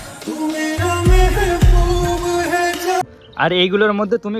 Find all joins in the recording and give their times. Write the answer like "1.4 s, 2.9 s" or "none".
3.0 s